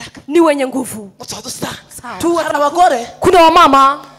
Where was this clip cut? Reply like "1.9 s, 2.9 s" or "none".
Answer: 2.5 s